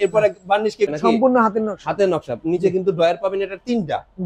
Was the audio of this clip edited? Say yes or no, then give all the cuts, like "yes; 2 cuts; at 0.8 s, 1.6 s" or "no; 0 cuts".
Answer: yes; 1 cut; at 0.9 s